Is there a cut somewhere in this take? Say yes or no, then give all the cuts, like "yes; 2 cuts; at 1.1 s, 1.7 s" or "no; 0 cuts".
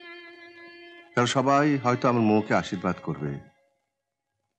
no; 0 cuts